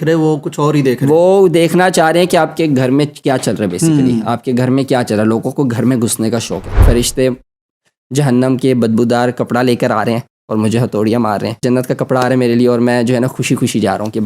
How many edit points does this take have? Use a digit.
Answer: 2